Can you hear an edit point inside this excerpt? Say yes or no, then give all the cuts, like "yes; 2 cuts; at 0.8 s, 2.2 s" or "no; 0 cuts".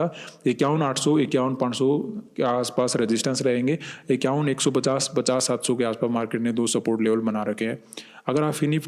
no; 0 cuts